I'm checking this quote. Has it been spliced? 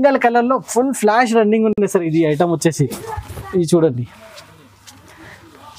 no; 0 cuts

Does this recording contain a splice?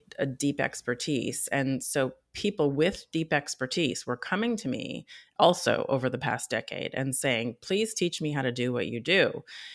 no; 0 cuts

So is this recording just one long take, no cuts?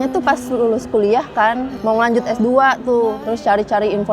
no; 2 cuts; at 1.7 s, 3.3 s

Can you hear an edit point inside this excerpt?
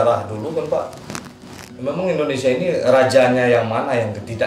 no; 0 cuts

